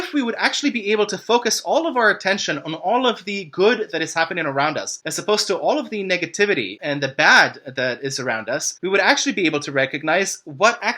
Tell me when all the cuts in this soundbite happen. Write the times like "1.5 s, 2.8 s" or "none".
none

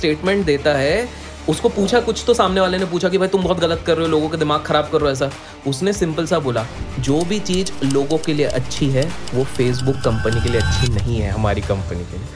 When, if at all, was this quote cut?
none

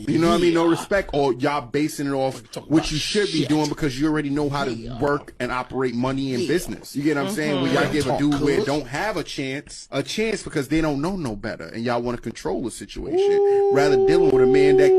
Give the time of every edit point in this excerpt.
12.3 s

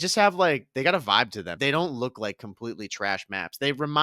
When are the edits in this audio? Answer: 1.4 s

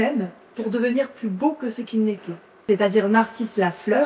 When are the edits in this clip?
2.6 s

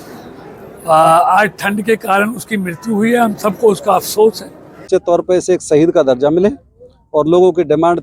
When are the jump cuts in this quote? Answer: 4.9 s

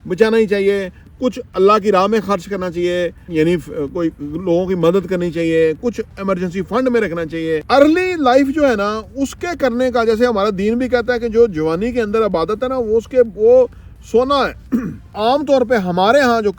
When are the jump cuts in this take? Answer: 3.2 s, 7.6 s, 15.0 s

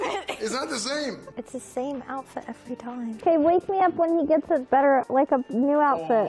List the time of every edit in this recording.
1.2 s, 3.2 s

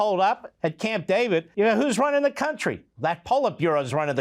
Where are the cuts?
1.5 s

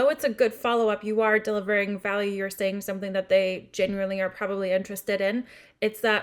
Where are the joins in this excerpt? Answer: none

